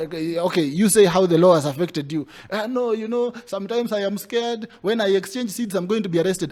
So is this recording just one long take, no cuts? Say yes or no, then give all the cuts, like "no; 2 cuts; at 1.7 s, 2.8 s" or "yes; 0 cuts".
yes; 0 cuts